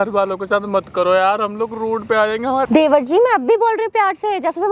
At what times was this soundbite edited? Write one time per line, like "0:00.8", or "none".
0:02.7